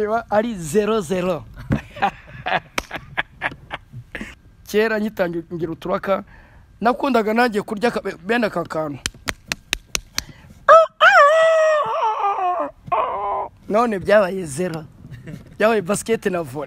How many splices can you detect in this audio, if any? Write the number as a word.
one